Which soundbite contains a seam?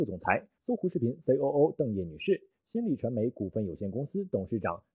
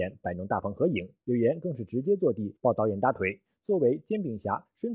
first; 1 cut; at 4.0 s

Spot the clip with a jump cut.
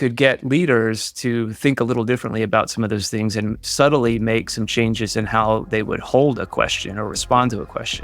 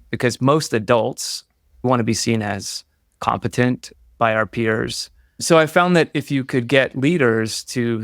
second; 2 cuts; at 1.8 s, 5.3 s

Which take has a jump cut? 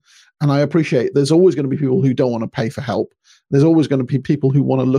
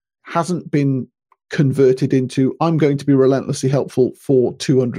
first; 2 cuts; at 1.1 s, 4.1 s

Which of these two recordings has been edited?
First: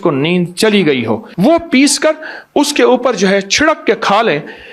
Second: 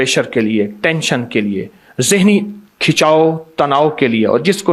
first; 1 cut; at 1.3 s

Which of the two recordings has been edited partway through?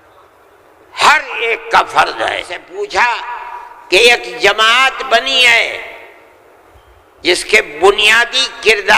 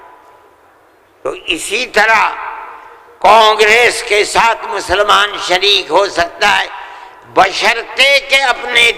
first; 1 cut; at 2.6 s

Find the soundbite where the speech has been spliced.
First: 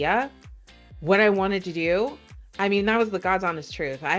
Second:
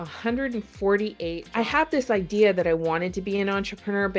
second; 1 cut; at 1.4 s

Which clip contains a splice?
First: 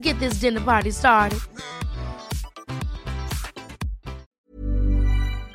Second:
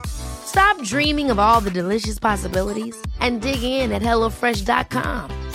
first; 1 cut; at 4.3 s

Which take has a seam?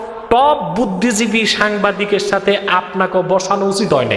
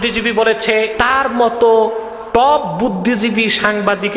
second; 1 cut; at 0.9 s

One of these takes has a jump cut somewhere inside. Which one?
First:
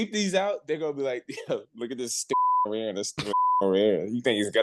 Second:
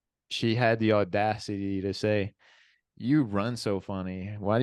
first; 1 cut; at 2.3 s

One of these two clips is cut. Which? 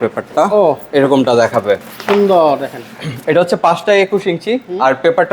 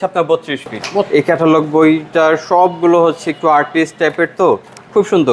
second; 1 cut; at 1.1 s

